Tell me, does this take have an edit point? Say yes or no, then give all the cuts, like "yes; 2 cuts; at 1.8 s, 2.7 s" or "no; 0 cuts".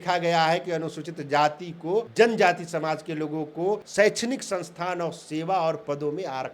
yes; 2 cuts; at 2.1 s, 3.9 s